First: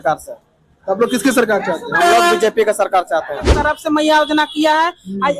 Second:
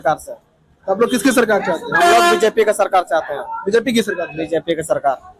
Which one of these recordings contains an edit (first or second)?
first